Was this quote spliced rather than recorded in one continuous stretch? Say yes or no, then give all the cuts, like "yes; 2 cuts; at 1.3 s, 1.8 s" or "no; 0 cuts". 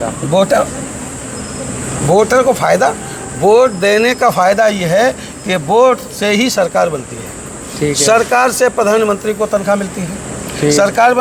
no; 0 cuts